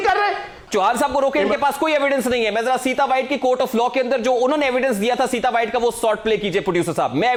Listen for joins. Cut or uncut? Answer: uncut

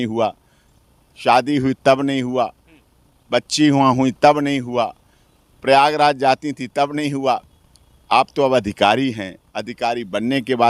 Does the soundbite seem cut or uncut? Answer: uncut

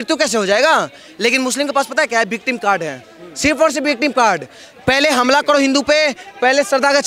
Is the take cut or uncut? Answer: cut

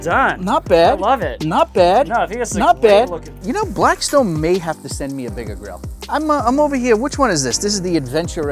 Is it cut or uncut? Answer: cut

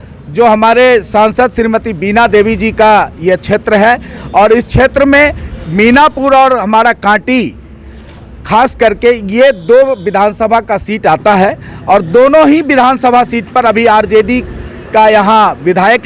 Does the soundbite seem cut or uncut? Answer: uncut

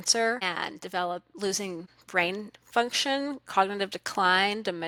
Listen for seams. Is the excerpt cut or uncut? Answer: uncut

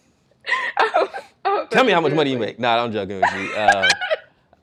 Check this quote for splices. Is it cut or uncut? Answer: uncut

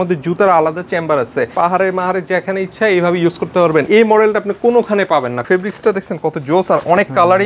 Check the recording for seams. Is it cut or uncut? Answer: cut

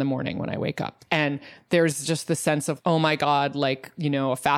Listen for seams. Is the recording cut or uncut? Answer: cut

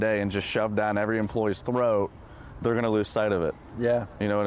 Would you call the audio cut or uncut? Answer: uncut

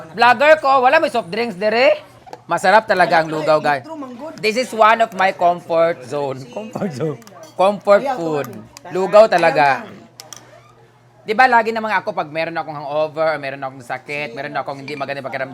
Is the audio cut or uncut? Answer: uncut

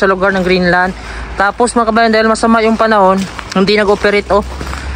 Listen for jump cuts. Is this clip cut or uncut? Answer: uncut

